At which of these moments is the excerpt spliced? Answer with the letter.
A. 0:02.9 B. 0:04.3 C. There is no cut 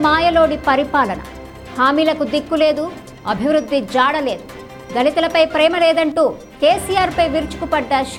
C